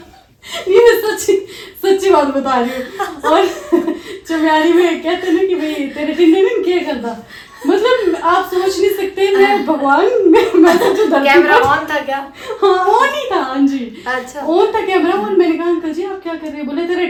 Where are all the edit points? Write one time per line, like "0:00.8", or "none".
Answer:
none